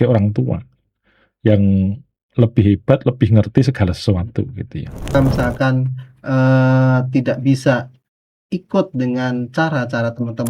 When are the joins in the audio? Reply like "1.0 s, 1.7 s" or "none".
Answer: 5.1 s